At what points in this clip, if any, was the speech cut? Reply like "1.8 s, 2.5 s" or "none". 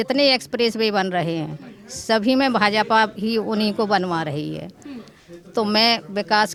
none

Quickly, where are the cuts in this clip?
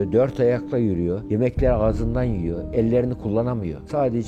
none

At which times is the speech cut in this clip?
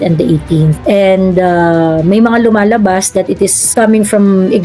3.6 s

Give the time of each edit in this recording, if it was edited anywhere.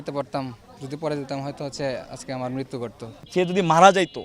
3.1 s

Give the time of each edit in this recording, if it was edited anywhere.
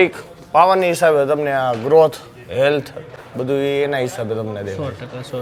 none

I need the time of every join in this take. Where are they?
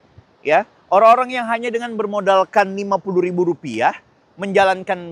none

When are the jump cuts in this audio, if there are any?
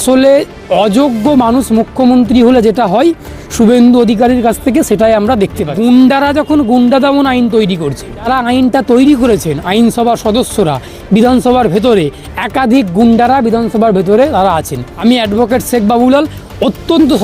5.7 s, 8.2 s, 14.8 s

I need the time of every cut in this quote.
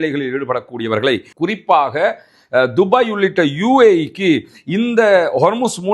1.3 s

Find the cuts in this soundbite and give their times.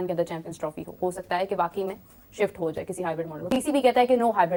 none

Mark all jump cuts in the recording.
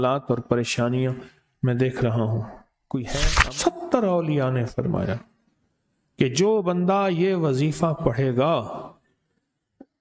3.1 s

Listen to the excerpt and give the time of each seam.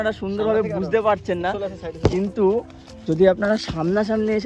none

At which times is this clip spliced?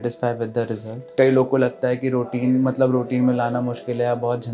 1.1 s

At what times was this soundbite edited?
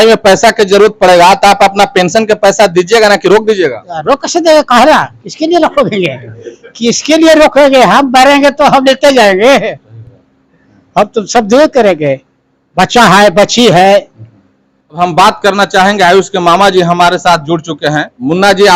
none

